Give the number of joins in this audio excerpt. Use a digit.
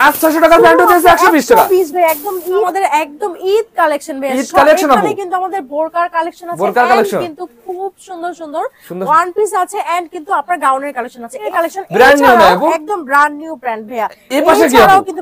2